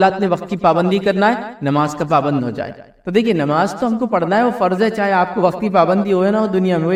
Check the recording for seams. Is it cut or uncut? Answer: uncut